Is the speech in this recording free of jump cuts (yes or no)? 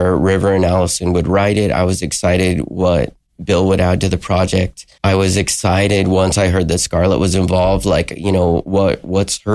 yes